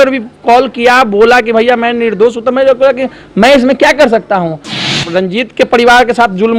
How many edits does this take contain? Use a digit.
1